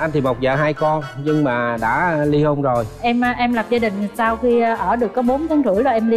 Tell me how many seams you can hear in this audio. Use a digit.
1